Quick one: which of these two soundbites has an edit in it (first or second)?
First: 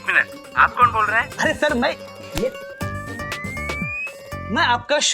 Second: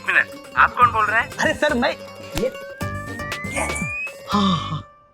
first